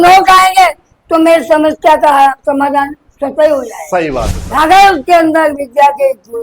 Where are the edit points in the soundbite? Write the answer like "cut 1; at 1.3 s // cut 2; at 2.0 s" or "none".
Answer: cut 1; at 4.6 s